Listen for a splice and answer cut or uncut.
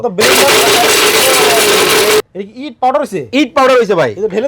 cut